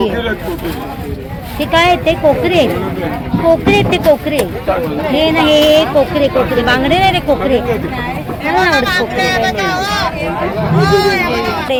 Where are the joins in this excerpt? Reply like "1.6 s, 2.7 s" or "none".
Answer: none